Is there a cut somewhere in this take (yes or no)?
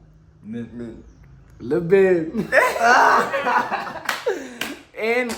no